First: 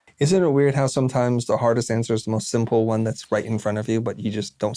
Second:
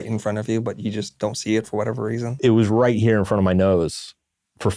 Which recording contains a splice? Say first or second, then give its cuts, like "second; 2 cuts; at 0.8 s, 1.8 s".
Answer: second; 1 cut; at 2.3 s